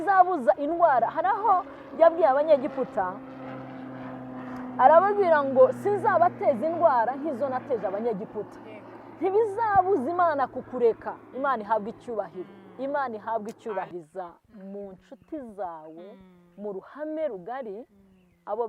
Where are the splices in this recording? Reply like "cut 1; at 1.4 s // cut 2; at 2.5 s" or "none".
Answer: cut 1; at 13.9 s